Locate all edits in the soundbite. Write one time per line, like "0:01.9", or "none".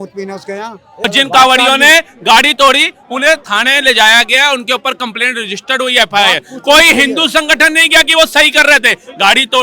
0:01.1

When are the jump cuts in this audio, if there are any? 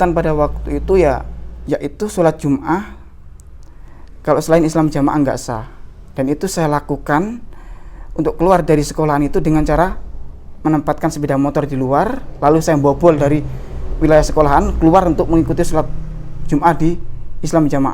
0:01.5

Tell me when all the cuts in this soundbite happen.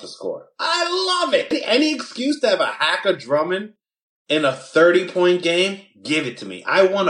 0:01.6

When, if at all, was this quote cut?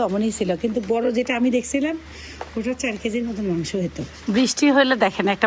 0:04.1

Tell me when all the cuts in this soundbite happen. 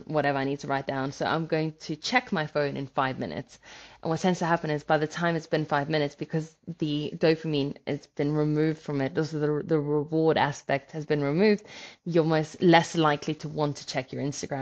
none

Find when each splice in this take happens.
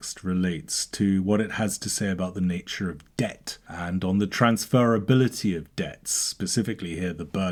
none

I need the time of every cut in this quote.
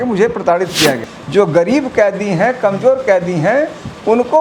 0:01.1

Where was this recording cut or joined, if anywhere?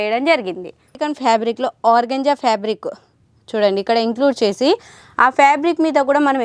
0:01.0

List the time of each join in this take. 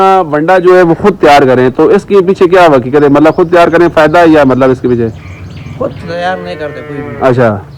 none

